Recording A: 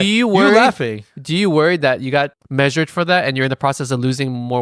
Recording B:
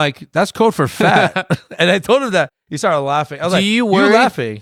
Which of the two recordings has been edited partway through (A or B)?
A